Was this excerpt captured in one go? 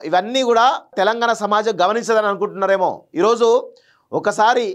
no; 1 cut; at 0.9 s

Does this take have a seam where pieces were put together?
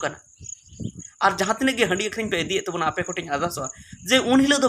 yes; 1 cut; at 1.0 s

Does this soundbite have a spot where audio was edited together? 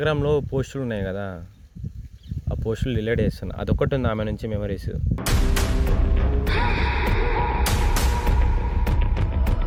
no; 0 cuts

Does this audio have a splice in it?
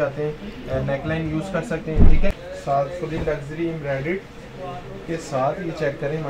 yes; 1 cut; at 2.5 s

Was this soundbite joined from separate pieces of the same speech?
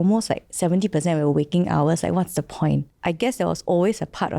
yes; 1 cut; at 2.9 s

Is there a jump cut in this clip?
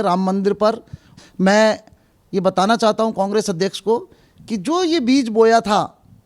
yes; 1 cut; at 1.1 s

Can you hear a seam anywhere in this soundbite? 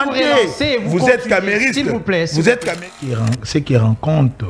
yes; 1 cut; at 3.0 s

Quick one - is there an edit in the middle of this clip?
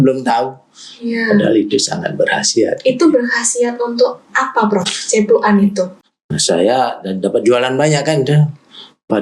yes; 1 cut; at 5.9 s

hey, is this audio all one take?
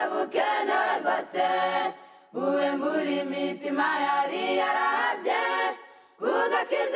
yes; 0 cuts

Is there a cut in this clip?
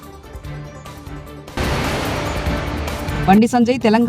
yes; 1 cut; at 1.5 s

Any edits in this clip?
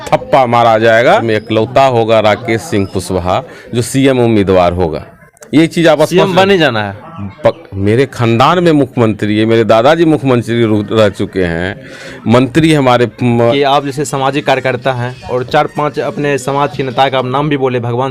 yes; 2 cuts; at 1.2 s, 13.5 s

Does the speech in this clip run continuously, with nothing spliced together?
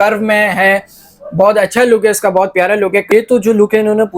no; 1 cut; at 3.1 s

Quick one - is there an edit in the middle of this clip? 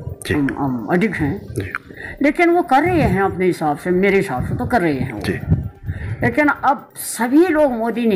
no; 0 cuts

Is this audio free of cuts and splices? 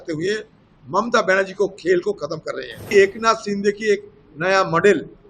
no; 1 cut; at 2.8 s

